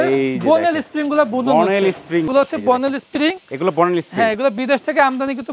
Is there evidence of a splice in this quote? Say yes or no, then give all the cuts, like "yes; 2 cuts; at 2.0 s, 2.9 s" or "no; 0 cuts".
yes; 1 cut; at 2.3 s